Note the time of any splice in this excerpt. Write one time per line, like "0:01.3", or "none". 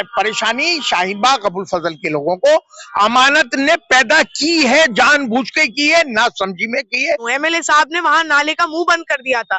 0:07.3